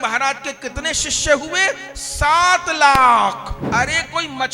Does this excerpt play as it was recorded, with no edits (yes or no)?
no